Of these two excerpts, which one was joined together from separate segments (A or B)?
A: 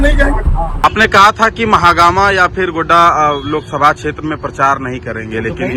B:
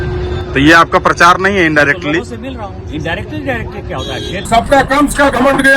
B